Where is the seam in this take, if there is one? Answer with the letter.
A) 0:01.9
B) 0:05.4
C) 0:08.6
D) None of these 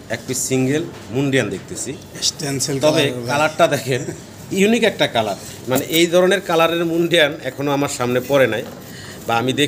D